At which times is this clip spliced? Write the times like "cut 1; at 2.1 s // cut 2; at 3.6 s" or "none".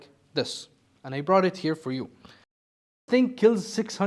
cut 1; at 2.9 s